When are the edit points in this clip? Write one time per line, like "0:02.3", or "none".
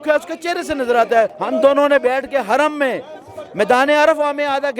0:01.4